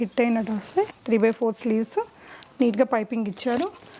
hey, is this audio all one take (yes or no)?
no